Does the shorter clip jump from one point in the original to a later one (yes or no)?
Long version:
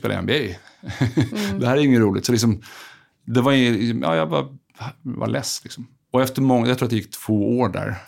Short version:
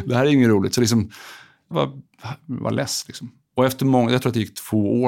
yes